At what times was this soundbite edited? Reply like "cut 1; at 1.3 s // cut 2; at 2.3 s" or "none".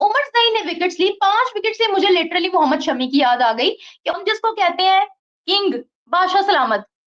cut 1; at 4.1 s